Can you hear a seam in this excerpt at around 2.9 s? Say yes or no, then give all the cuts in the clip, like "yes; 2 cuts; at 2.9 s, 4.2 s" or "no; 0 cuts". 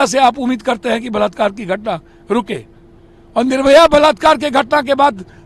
no; 0 cuts